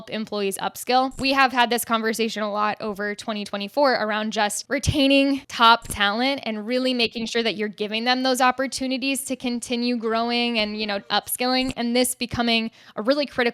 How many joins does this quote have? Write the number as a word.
three